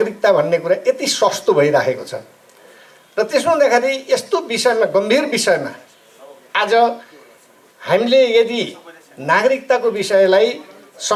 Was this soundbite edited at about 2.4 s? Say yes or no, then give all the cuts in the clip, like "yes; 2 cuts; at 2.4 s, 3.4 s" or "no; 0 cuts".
no; 0 cuts